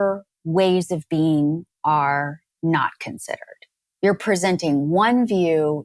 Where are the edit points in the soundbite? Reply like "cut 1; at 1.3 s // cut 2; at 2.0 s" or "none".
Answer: none